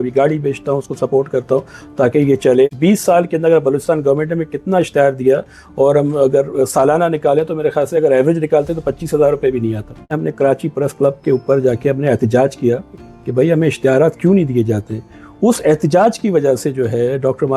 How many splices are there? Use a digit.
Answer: 2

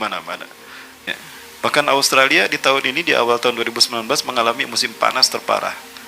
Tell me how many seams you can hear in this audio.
1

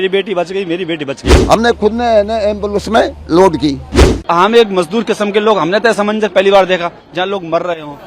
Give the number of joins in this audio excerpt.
2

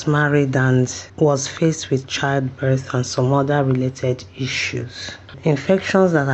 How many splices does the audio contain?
2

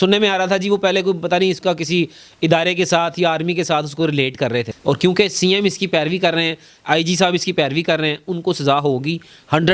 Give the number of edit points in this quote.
1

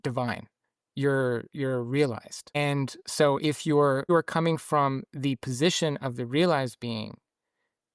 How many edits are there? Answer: 2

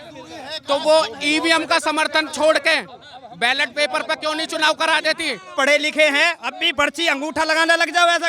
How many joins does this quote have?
1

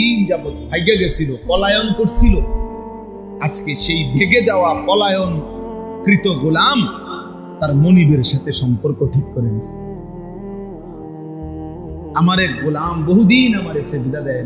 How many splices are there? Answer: 0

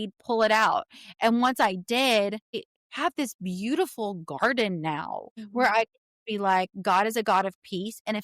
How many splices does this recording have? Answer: 1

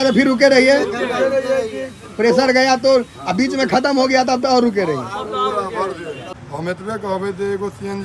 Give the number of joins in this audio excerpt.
1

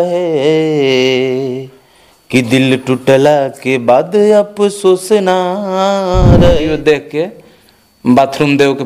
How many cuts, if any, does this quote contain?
1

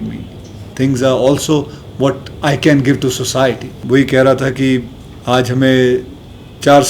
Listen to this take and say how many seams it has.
1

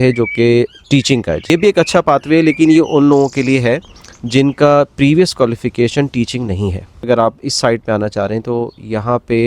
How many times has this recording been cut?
2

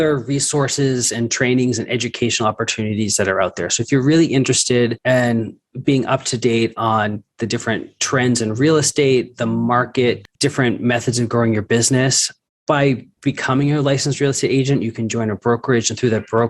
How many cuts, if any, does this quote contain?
3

